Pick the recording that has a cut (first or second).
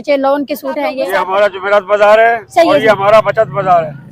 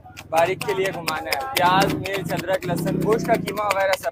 first